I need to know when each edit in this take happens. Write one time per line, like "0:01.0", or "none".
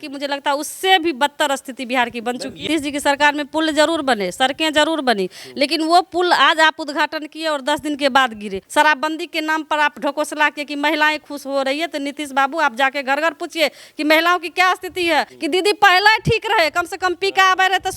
0:02.6
0:08.6
0:15.3